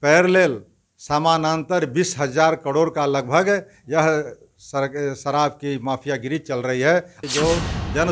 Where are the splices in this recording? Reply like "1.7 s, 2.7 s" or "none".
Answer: 7.2 s